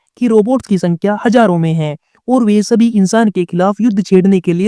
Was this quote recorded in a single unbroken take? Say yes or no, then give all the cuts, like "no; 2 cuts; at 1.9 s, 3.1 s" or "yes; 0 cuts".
yes; 0 cuts